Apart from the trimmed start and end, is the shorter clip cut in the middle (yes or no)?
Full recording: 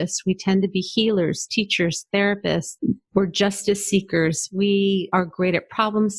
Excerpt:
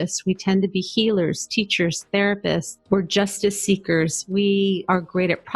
yes